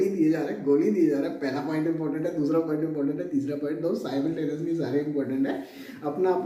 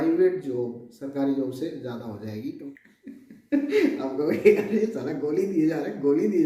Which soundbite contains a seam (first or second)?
second